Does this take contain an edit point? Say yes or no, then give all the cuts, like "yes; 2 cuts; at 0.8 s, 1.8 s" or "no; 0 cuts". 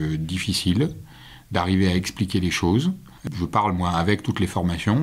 yes; 1 cut; at 3.2 s